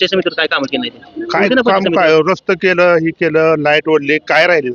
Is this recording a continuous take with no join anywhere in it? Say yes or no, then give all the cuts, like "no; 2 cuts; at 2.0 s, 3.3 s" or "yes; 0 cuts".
yes; 0 cuts